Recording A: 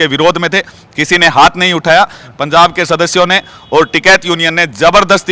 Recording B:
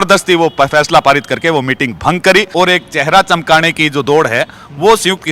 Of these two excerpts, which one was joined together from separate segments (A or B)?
B